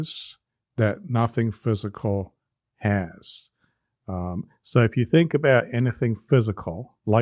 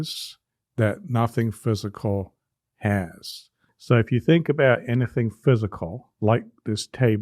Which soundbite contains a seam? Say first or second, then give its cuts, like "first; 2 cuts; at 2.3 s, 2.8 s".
second; 1 cut; at 3.7 s